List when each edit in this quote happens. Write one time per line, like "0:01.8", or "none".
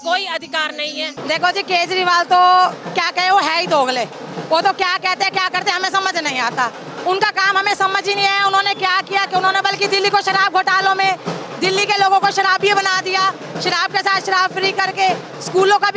0:01.2